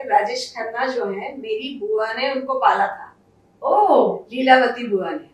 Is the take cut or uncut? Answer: uncut